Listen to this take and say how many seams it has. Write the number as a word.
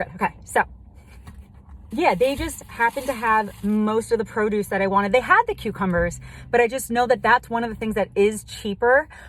zero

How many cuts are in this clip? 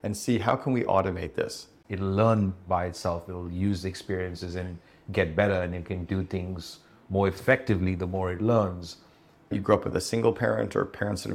two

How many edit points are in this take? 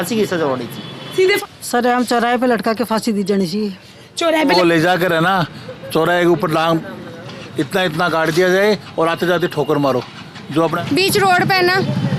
three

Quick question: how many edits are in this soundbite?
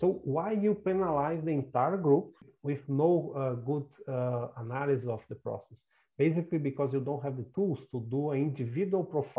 one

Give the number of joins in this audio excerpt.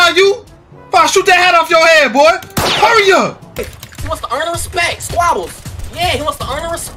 one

